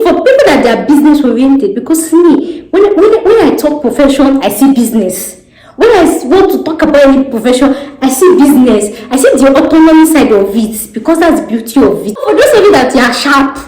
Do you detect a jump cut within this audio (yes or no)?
yes